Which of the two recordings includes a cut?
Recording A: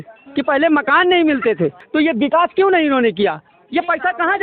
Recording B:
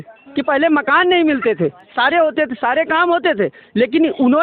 A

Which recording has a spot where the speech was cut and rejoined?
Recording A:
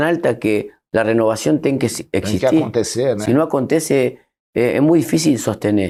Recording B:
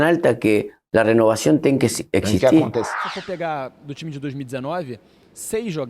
B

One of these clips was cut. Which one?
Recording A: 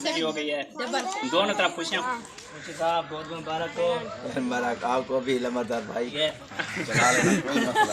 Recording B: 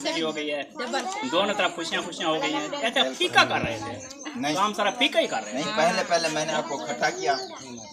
A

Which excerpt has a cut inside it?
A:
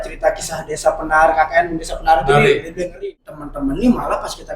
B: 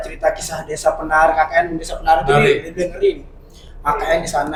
A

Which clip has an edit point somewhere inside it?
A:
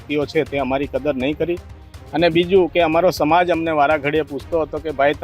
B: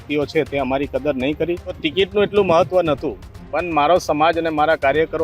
B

